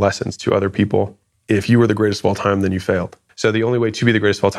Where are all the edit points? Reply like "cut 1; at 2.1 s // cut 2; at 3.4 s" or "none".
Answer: none